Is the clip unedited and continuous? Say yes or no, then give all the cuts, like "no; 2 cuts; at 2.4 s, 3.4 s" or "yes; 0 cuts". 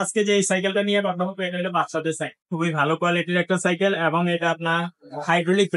no; 1 cut; at 2.5 s